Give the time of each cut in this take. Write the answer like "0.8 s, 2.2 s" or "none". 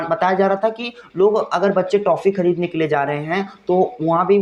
none